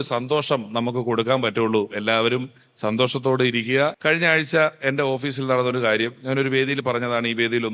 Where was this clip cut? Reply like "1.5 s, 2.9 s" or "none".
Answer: 4.0 s